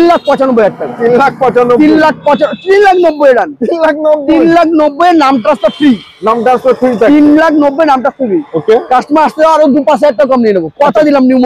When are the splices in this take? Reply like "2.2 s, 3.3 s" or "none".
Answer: none